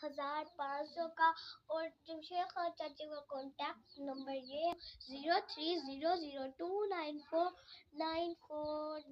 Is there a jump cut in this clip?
yes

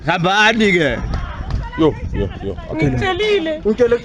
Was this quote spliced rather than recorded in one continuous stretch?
yes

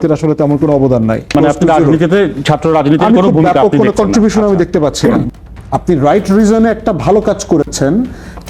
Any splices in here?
yes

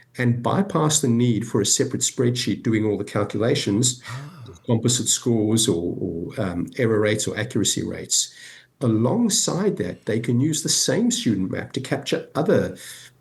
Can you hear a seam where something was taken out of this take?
no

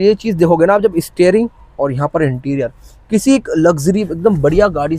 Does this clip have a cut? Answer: no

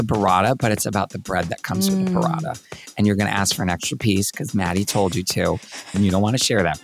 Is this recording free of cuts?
no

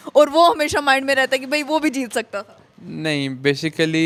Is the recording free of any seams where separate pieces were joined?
yes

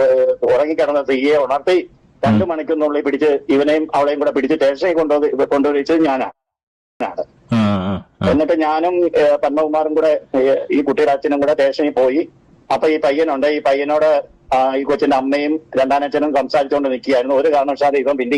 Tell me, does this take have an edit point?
no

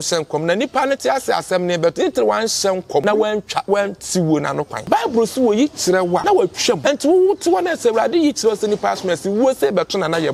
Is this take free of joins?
no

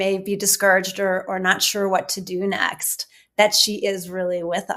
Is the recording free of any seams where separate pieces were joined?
yes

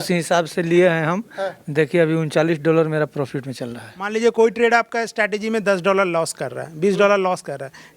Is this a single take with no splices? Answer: no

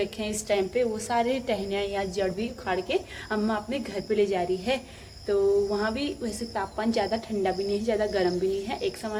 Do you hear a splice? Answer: no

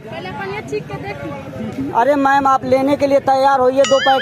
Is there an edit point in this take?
yes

